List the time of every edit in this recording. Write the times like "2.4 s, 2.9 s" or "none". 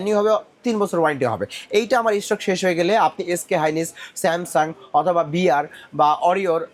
none